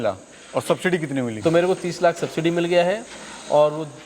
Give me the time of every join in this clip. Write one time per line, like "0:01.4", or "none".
0:01.4